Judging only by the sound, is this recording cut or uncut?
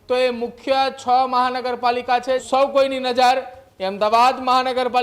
cut